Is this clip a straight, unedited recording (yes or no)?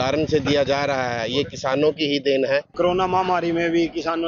no